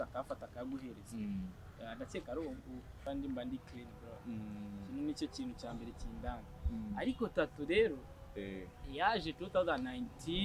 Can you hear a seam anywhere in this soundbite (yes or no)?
yes